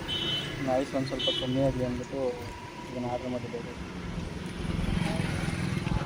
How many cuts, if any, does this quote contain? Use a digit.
0